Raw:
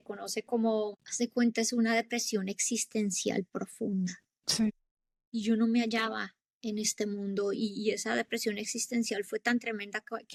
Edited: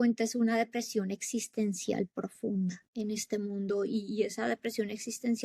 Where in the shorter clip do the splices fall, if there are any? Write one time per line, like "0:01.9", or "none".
0:02.8